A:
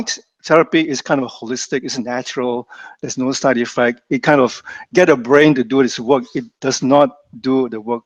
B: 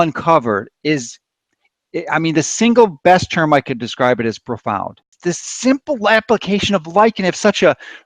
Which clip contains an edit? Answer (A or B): B